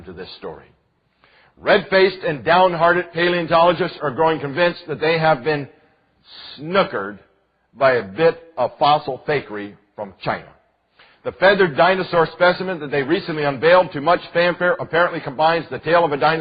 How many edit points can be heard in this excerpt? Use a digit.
1